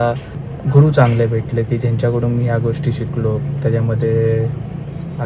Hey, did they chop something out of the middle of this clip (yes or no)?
no